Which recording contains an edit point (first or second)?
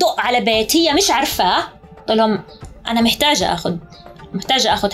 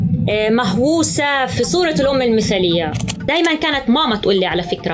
second